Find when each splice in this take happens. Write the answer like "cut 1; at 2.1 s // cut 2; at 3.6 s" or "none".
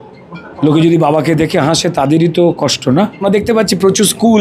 cut 1; at 3.2 s